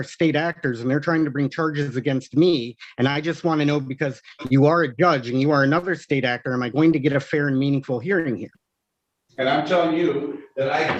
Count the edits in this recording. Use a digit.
0